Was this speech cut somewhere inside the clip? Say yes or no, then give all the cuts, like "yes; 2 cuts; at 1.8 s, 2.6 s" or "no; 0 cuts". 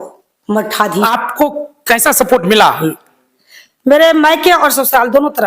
yes; 1 cut; at 1.1 s